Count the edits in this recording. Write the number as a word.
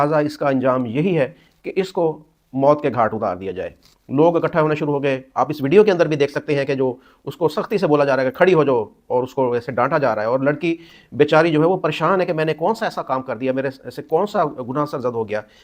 zero